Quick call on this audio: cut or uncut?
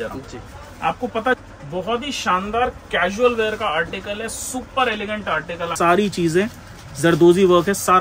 cut